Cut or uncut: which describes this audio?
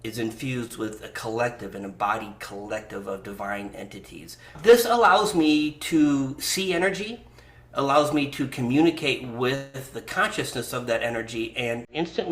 cut